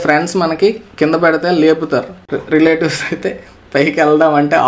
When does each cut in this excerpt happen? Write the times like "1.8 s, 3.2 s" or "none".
2.2 s